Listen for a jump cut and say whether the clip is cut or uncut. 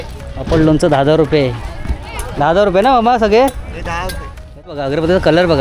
cut